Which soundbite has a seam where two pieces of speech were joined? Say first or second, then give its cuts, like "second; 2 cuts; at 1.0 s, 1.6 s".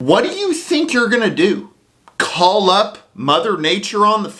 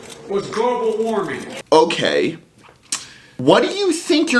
second; 1 cut; at 1.4 s